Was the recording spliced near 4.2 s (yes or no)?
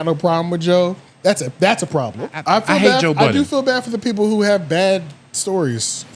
no